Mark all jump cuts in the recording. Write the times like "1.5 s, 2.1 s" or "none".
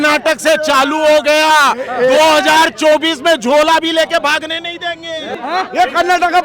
5.4 s